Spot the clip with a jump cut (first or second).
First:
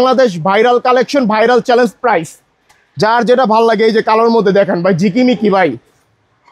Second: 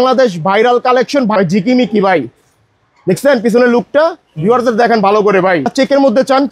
second